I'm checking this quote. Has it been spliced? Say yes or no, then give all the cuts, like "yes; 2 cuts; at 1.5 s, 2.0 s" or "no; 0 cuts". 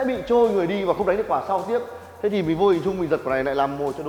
no; 0 cuts